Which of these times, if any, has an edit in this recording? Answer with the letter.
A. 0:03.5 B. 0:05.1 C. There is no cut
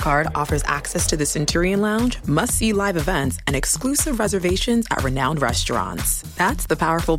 C